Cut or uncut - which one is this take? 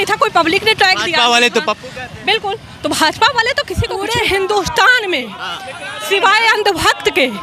cut